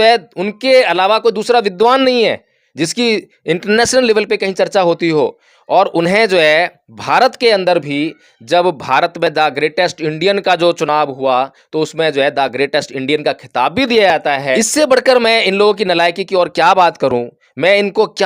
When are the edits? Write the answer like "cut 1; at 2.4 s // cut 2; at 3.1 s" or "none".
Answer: cut 1; at 14.6 s